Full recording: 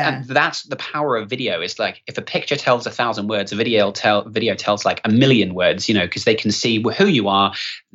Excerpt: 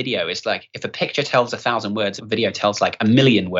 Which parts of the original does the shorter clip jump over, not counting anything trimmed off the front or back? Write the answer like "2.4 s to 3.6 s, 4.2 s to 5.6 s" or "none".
3.5 s to 4.2 s